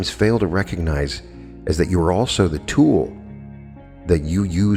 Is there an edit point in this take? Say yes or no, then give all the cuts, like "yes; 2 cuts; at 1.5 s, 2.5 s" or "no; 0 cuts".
no; 0 cuts